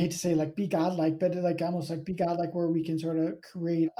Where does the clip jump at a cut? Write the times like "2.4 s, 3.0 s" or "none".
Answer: none